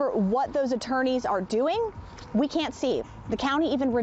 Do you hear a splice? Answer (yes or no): no